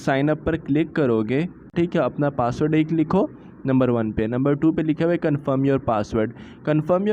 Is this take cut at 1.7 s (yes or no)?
yes